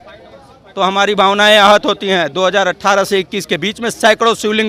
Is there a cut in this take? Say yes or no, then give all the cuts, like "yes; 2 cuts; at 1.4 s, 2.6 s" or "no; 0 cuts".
no; 0 cuts